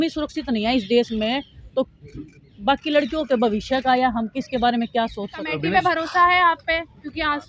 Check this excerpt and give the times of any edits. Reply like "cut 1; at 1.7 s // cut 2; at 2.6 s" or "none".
cut 1; at 5.4 s